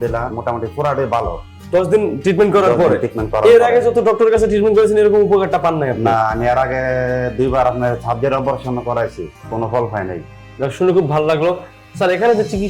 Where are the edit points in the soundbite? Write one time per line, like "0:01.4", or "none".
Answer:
0:10.2